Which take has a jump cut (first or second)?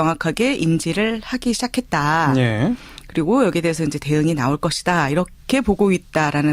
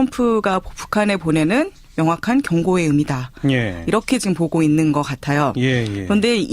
second